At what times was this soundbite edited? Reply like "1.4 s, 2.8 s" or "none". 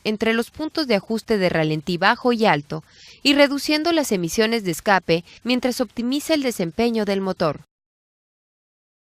6.7 s